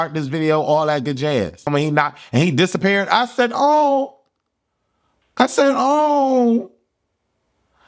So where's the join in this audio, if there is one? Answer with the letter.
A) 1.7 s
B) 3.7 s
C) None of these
A